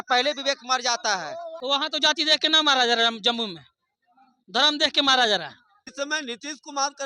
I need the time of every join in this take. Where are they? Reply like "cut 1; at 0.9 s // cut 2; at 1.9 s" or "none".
cut 1; at 1.5 s // cut 2; at 5.9 s

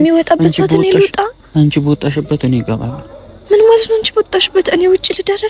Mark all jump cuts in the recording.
none

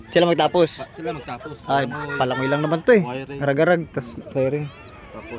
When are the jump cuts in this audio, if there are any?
none

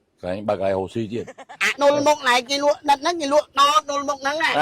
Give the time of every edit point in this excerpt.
cut 1; at 1.6 s

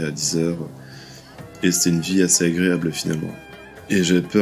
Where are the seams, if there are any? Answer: cut 1; at 3.5 s

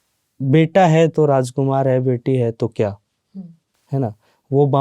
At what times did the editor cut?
none

